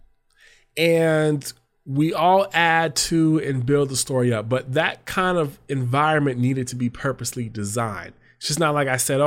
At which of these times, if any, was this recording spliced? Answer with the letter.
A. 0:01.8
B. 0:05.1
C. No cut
C